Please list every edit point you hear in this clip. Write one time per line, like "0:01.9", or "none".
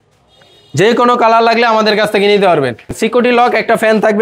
0:03.0